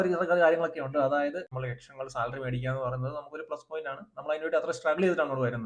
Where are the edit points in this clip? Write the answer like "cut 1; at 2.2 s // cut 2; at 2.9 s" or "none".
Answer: cut 1; at 1.5 s